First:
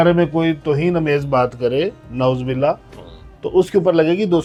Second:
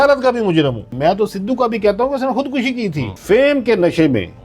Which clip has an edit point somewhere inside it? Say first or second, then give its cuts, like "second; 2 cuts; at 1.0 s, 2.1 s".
second; 2 cuts; at 0.9 s, 3.1 s